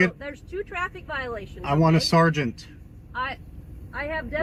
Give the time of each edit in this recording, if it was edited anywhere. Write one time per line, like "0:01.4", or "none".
none